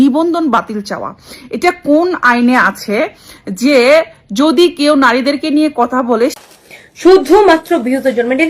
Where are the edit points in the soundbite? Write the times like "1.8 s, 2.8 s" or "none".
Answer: 6.4 s